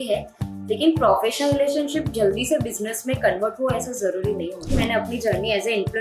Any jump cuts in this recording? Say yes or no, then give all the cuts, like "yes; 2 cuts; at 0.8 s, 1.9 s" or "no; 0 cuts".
yes; 1 cut; at 4.7 s